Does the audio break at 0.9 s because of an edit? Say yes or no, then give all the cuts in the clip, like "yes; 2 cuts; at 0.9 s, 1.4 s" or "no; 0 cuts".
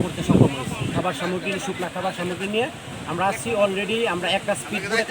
yes; 1 cut; at 0.9 s